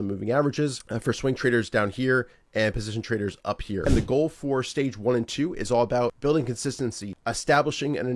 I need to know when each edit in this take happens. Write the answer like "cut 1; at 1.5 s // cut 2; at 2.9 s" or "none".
cut 1; at 0.9 s // cut 2; at 3.9 s // cut 3; at 6.2 s // cut 4; at 7.1 s